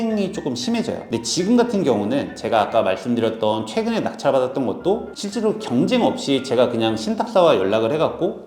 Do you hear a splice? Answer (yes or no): yes